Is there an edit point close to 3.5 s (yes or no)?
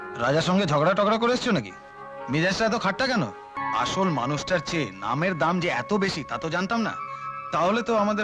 yes